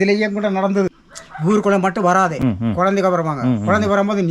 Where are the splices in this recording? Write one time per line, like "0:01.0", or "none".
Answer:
0:01.1
0:02.3